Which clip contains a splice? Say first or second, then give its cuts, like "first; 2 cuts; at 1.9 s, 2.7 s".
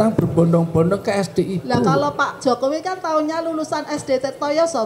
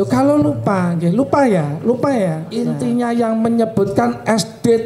second; 1 cut; at 2.5 s